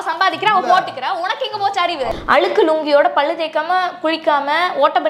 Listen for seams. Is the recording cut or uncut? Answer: cut